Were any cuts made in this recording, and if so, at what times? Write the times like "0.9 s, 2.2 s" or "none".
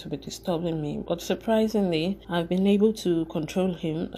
2.2 s